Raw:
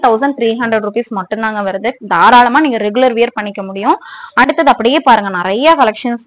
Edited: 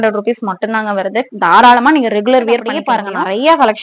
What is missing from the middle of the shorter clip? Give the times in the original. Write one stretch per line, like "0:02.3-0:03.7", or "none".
0:03.4-0:04.9